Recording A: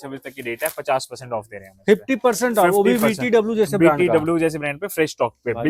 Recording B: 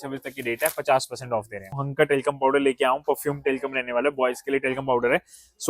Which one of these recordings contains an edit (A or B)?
B